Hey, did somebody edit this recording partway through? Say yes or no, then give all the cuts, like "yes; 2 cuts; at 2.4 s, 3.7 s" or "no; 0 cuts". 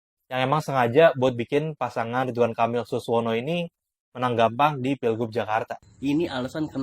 yes; 1 cut; at 5.8 s